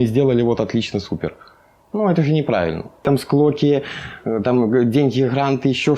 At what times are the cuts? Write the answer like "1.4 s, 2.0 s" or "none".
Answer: 3.0 s